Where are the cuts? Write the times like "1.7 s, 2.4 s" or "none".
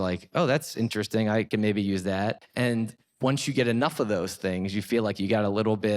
1.5 s, 2.7 s